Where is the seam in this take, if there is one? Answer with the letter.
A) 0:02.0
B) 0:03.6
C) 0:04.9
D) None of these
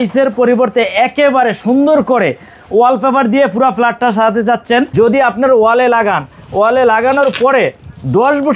C